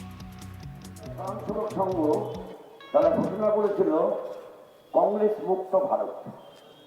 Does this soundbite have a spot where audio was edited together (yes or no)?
yes